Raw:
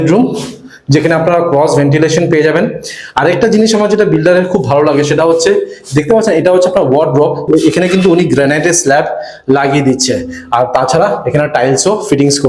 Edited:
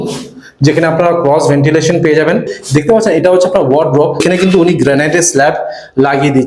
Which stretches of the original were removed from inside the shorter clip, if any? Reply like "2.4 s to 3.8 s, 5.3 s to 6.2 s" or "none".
2.8 s to 5.8 s, 7.4 s to 7.7 s